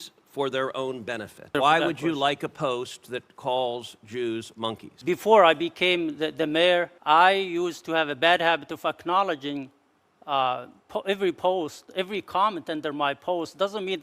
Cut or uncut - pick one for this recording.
cut